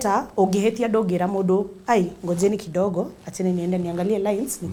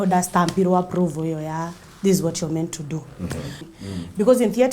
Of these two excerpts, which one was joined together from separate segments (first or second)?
second